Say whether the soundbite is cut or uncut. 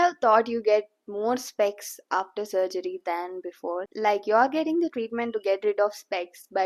uncut